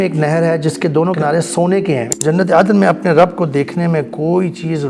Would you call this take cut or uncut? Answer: cut